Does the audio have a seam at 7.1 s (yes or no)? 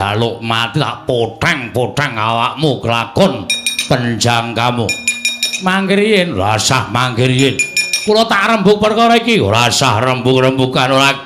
no